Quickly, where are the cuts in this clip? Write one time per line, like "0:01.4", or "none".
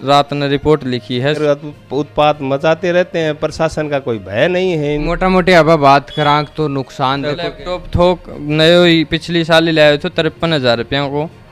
0:01.4
0:05.1
0:07.3